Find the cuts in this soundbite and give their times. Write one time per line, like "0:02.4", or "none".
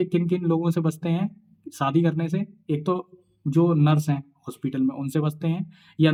none